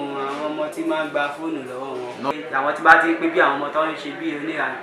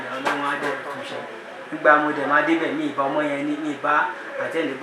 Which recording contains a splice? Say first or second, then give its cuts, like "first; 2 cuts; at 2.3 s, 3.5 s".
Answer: first; 1 cut; at 2.3 s